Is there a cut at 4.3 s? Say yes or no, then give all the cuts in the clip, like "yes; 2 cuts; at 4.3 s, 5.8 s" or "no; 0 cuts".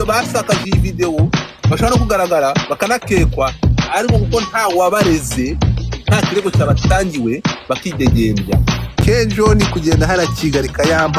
no; 1 cut; at 9.0 s